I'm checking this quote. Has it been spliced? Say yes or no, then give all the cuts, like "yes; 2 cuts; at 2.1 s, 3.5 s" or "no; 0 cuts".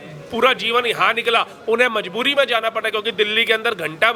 no; 0 cuts